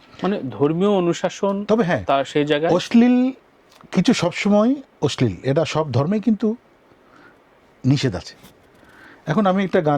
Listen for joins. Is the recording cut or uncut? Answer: uncut